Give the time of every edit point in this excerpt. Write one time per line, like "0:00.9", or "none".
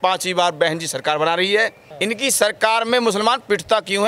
0:01.8